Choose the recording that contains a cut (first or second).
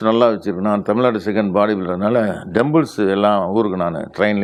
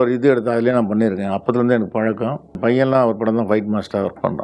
second